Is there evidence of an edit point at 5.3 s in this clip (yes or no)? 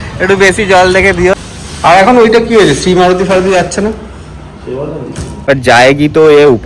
yes